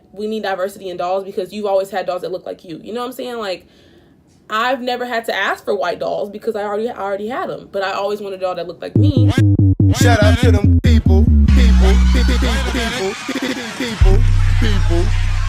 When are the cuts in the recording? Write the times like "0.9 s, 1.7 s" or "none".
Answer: 8.8 s